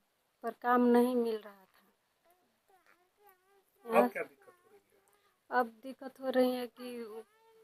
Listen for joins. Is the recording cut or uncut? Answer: uncut